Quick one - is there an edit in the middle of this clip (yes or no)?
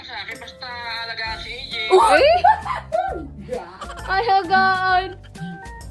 no